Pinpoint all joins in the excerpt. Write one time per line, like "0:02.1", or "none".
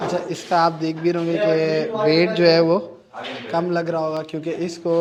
none